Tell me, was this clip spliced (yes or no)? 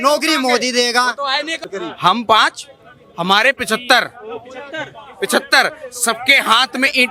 yes